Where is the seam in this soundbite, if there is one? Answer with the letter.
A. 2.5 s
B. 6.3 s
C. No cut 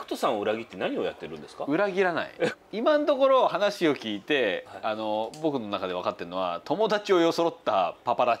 A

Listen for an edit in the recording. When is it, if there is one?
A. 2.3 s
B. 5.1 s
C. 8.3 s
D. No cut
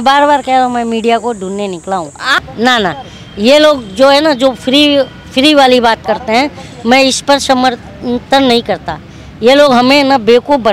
A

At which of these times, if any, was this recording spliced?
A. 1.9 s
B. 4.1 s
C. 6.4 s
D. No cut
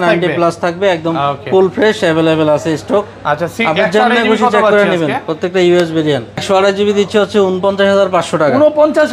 C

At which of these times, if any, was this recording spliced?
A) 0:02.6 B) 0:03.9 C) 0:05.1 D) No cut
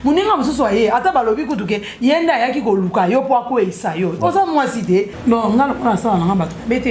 C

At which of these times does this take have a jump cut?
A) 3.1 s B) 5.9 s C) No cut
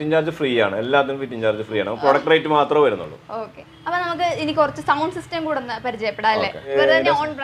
C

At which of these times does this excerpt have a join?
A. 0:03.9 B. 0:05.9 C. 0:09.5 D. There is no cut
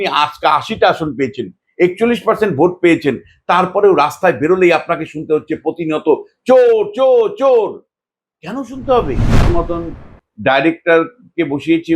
C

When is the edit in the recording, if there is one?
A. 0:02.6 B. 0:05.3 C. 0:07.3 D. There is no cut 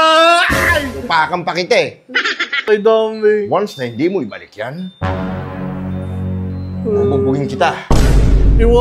A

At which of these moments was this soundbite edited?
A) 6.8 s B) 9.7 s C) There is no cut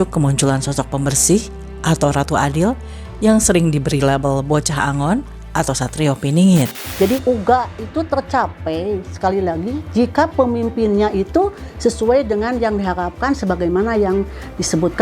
A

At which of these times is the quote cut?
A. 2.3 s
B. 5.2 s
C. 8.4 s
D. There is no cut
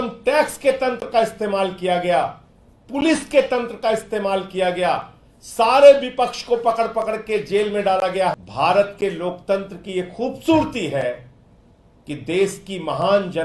C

